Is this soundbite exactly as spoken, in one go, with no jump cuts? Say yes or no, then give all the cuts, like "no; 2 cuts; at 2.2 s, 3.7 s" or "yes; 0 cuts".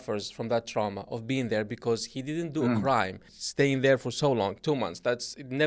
no; 1 cut; at 3.4 s